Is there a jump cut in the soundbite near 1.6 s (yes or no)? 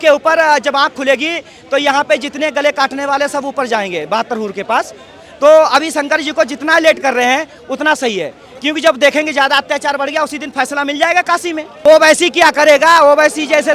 no